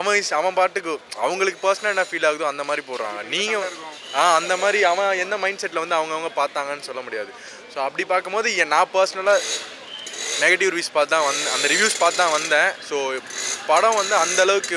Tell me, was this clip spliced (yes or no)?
no